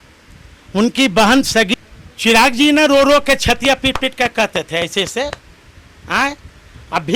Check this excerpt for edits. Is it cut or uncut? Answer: cut